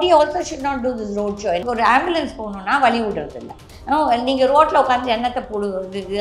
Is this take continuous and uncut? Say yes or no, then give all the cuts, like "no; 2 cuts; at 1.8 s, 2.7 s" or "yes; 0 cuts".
no; 1 cut; at 1.6 s